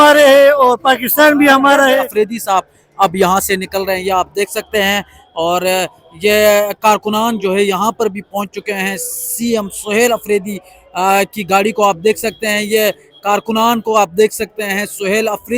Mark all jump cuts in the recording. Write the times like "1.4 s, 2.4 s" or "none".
2.1 s